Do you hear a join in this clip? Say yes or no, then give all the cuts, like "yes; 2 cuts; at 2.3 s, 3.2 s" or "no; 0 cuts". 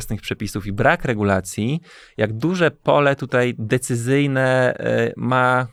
no; 0 cuts